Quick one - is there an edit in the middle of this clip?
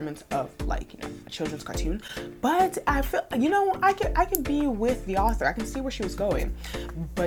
no; 0 cuts

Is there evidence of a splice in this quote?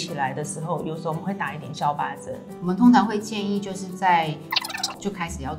yes; 1 cut; at 2.5 s

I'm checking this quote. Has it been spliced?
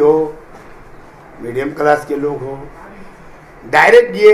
no; 0 cuts

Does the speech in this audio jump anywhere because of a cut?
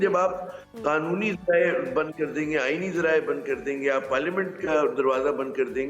no; 0 cuts

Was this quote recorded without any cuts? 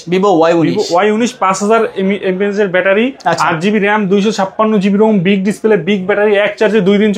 yes; 0 cuts

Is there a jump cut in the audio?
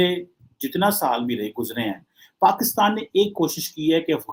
no; 0 cuts

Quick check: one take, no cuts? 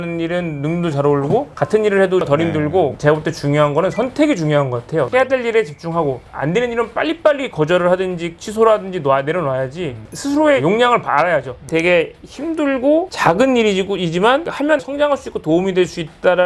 no; 4 cuts; at 2.9 s, 5.1 s, 10.0 s, 11.7 s

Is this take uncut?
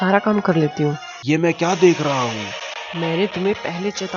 no; 1 cut; at 1.1 s

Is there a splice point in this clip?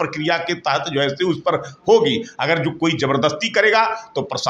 no; 0 cuts

